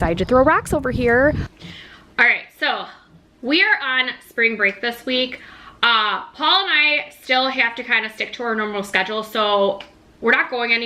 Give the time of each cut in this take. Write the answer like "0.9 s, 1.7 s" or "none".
1.5 s